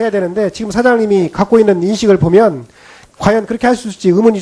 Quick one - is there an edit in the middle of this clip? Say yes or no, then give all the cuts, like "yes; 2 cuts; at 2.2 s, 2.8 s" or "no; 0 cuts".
yes; 1 cut; at 0.9 s